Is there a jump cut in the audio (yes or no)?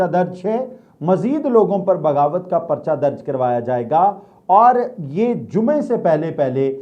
no